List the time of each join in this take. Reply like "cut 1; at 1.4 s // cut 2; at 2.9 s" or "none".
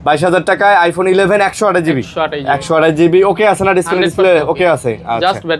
none

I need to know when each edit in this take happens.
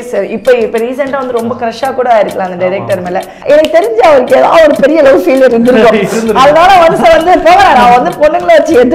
cut 1; at 3.3 s

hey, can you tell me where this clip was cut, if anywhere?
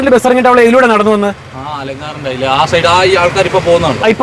none

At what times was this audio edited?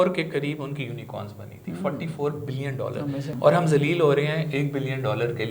cut 1; at 3.3 s

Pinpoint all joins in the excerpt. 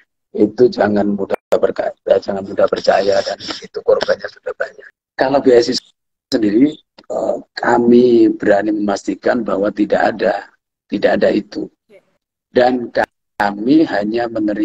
cut 1; at 4.7 s

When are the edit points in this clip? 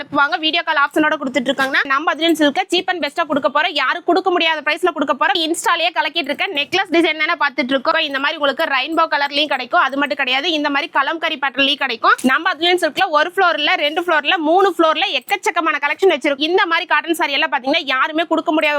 cut 1; at 1.8 s // cut 2; at 5.4 s // cut 3; at 8.1 s // cut 4; at 12.1 s // cut 5; at 16.4 s

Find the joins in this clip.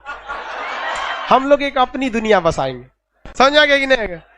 cut 1; at 1.1 s

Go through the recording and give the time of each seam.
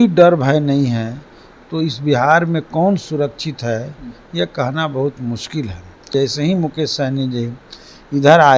cut 1; at 6.0 s

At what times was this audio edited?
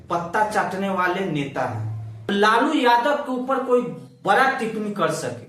cut 1; at 2.2 s

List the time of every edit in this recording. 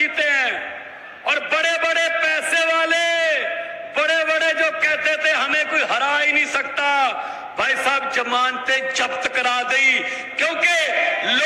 none

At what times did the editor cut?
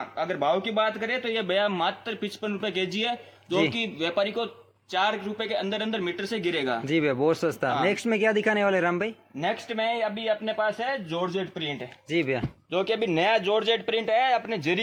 none

